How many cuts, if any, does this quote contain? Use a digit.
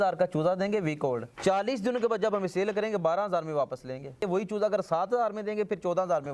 2